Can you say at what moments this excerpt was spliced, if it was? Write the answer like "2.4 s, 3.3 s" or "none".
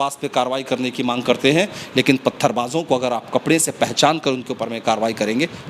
none